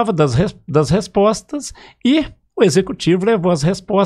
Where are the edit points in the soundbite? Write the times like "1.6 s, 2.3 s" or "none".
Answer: none